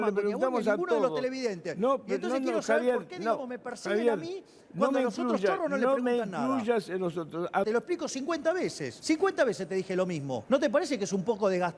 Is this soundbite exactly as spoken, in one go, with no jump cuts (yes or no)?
no